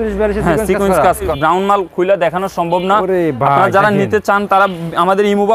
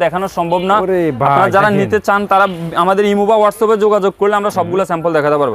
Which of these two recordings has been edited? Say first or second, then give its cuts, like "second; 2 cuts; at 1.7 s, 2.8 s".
first; 1 cut; at 1.3 s